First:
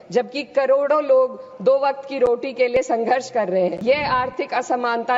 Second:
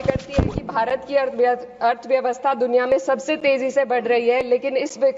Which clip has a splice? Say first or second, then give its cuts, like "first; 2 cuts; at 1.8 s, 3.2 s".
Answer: first; 1 cut; at 3.8 s